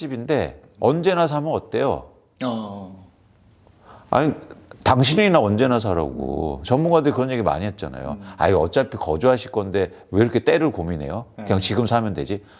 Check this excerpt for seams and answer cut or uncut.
uncut